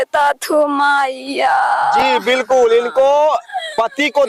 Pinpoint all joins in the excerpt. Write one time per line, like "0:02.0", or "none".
none